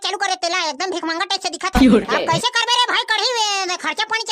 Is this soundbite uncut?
no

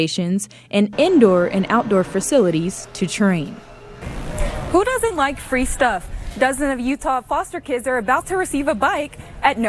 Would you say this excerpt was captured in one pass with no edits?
no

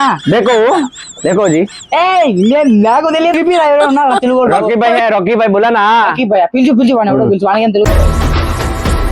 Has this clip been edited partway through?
yes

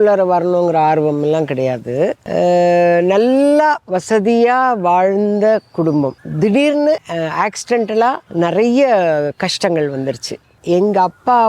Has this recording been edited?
yes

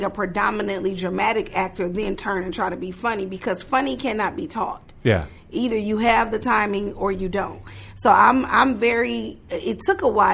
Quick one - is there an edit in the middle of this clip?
no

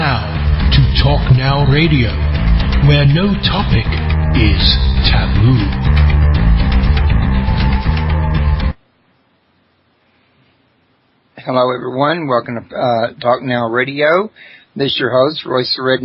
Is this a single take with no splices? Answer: yes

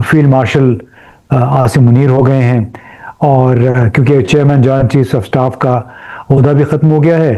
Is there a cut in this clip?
no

